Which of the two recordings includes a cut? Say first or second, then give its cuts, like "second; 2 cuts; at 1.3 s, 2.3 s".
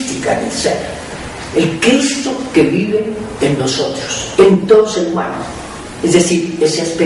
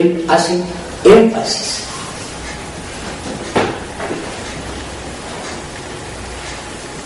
first; 1 cut; at 1.0 s